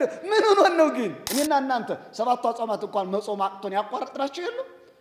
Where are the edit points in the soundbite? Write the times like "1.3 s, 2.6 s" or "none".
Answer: 1.2 s